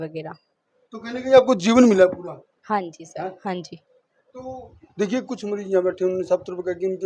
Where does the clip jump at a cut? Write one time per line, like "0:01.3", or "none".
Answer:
none